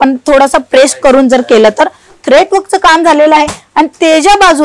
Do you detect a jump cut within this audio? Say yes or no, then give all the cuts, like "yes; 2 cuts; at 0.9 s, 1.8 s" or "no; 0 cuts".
yes; 1 cut; at 2.1 s